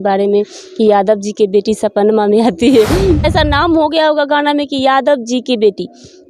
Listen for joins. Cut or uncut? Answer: cut